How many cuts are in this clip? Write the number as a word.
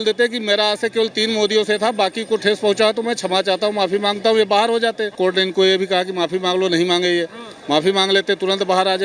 one